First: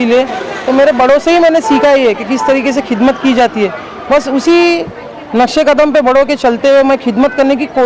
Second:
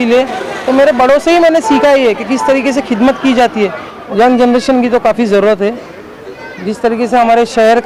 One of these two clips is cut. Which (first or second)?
second